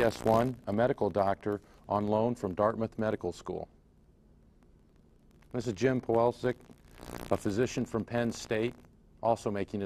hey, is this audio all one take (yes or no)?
no